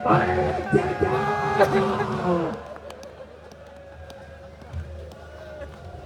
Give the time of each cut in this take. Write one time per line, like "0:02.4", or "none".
none